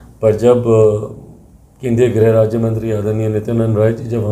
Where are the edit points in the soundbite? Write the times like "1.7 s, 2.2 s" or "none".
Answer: none